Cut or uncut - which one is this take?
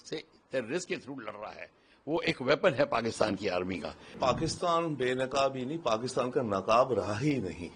cut